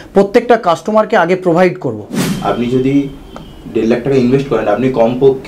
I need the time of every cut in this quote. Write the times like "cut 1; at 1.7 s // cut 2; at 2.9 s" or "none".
cut 1; at 2.2 s